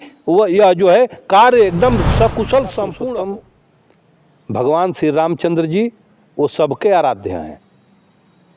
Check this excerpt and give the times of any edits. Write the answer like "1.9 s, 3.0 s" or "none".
3.1 s